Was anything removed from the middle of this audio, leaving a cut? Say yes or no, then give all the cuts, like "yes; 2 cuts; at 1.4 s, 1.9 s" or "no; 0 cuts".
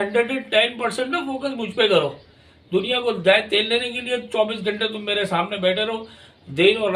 no; 0 cuts